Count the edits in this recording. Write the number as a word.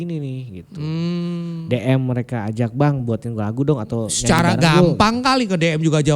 zero